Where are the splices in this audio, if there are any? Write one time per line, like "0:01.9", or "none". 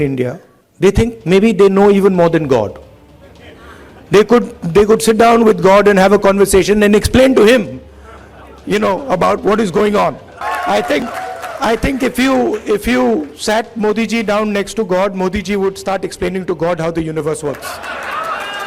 0:10.3